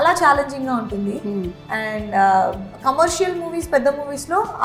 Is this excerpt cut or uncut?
uncut